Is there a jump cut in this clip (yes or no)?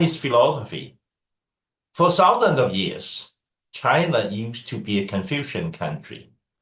no